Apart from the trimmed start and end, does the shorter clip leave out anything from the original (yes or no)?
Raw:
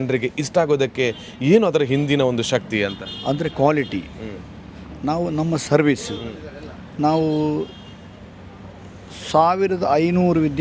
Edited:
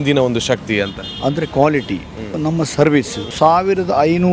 yes